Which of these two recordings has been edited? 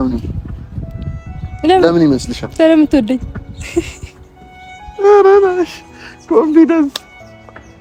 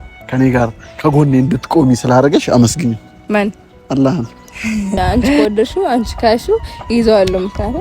second; 1 cut; at 5.4 s

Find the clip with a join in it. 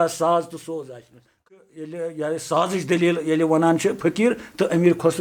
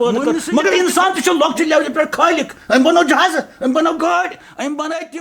first; 1 cut; at 1.4 s

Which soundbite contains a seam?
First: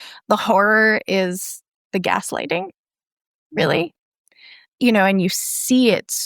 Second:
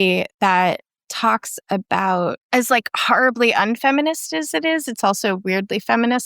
second; 1 cut; at 2.4 s

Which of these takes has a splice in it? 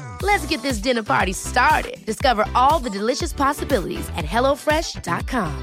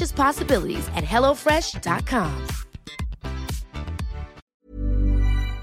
second; 1 cut; at 4.4 s

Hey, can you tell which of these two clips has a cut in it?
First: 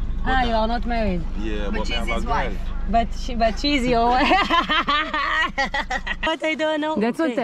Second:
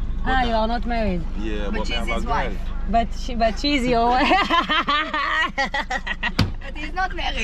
first; 1 cut; at 6.3 s

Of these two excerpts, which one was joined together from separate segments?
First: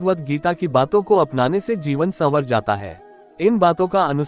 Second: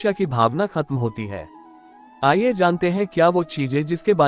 first; 1 cut; at 1.6 s

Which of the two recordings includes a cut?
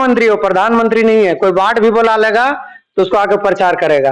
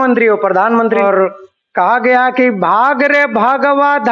second; 1 cut; at 1.0 s

